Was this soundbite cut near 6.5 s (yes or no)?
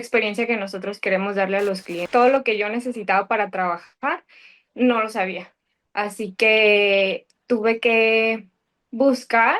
no